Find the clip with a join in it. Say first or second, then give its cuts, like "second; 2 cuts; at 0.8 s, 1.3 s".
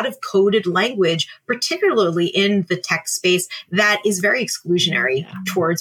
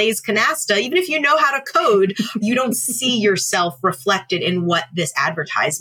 second; 1 cut; at 2.4 s